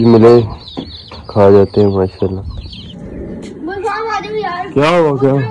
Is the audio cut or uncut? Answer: cut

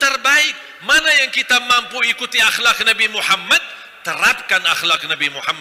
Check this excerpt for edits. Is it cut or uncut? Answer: uncut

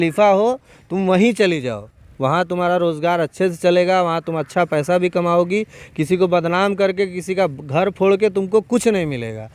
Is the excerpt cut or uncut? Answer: uncut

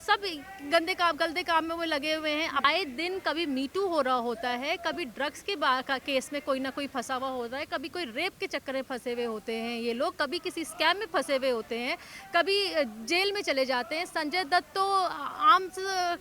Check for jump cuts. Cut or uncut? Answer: cut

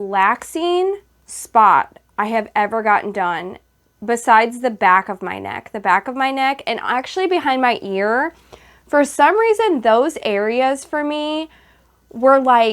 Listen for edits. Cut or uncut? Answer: uncut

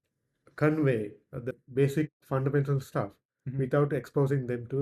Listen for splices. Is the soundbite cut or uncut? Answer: cut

